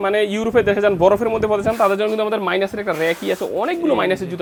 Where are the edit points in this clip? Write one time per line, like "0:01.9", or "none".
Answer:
none